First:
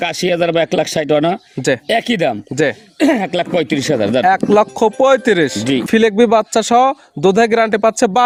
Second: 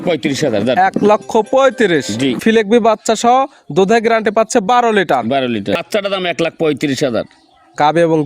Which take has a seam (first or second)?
second